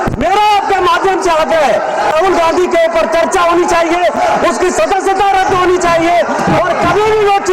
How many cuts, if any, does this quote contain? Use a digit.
1